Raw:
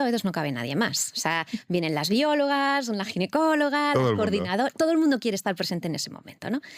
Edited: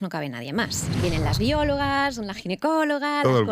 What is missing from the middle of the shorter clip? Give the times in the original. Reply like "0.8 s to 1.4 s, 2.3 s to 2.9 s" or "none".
1.2 s to 1.6 s